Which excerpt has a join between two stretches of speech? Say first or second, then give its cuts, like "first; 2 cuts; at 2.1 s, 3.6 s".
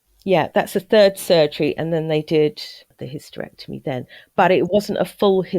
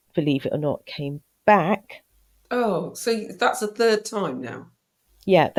first; 1 cut; at 2.9 s